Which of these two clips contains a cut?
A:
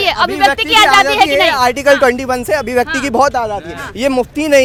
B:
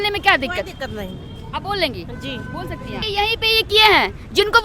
B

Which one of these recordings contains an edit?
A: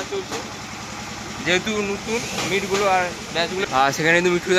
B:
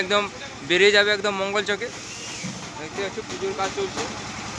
A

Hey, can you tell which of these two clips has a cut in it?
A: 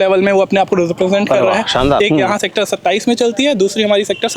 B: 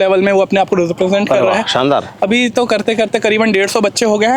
A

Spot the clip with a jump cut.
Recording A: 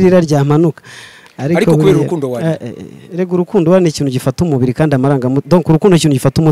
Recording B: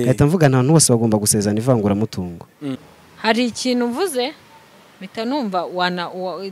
B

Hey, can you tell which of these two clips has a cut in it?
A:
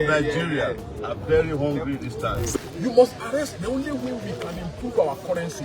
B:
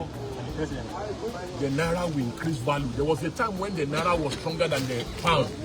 A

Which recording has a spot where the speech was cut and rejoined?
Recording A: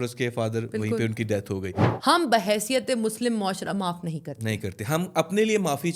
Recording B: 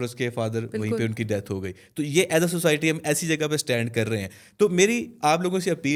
A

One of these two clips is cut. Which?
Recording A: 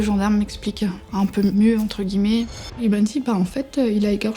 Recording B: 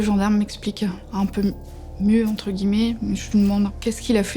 A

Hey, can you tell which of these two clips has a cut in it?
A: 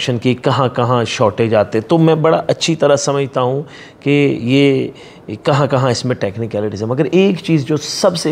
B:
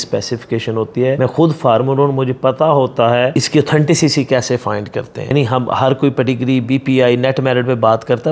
B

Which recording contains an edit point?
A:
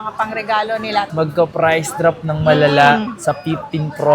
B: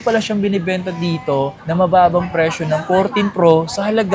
A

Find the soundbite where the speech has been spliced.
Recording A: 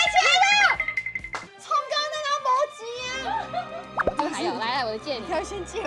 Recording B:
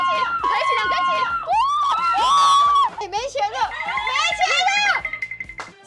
B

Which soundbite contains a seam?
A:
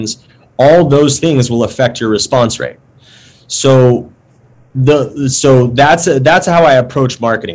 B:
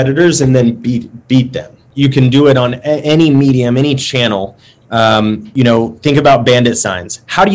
B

